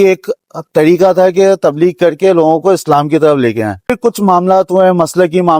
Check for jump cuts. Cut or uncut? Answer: cut